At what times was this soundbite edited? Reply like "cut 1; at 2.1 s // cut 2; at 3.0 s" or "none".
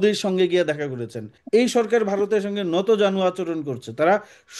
cut 1; at 1.3 s